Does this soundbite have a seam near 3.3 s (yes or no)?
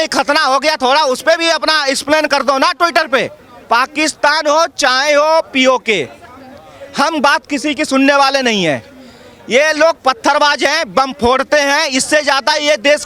no